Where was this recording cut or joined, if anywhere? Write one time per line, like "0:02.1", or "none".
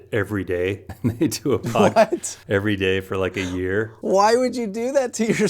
0:00.9
0:02.3
0:03.9